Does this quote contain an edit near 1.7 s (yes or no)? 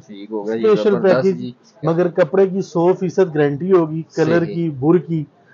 yes